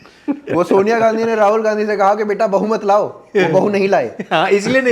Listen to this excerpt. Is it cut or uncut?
uncut